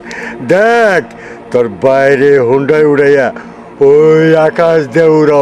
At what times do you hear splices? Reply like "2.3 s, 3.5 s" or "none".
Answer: none